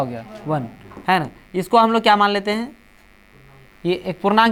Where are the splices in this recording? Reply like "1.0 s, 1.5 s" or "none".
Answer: none